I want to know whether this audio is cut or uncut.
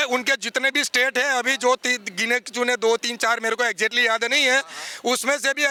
uncut